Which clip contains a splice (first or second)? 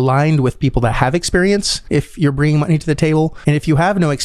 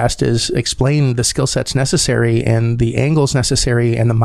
first